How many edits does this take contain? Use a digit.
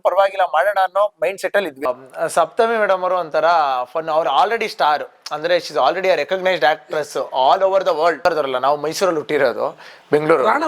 2